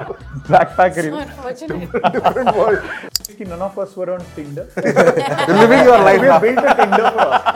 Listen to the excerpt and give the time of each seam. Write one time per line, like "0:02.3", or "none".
0:03.2